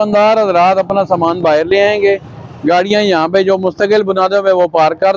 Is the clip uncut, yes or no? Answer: yes